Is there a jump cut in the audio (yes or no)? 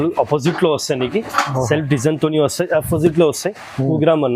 no